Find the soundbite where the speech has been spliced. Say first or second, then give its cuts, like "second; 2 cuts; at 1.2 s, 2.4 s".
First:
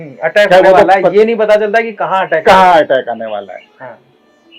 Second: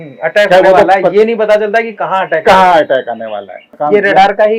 second; 1 cut; at 3.7 s